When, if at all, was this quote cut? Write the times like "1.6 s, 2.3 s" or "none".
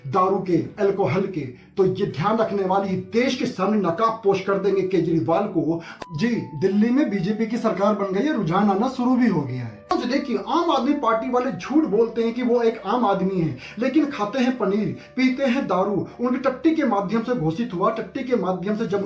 6.0 s, 9.9 s